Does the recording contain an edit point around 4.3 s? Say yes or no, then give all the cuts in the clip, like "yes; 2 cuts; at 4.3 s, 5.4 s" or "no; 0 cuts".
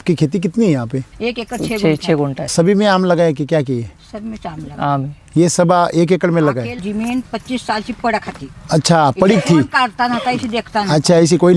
no; 3 cuts; at 1.1 s, 2.5 s, 6.8 s